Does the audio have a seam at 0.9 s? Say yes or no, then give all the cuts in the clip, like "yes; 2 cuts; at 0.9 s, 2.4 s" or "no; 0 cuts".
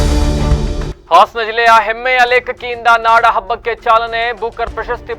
yes; 1 cut; at 0.9 s